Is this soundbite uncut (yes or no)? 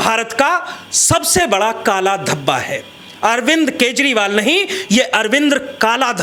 yes